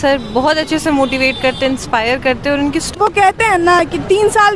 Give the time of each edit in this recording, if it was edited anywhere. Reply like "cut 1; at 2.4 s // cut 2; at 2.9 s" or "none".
cut 1; at 1.8 s // cut 2; at 2.9 s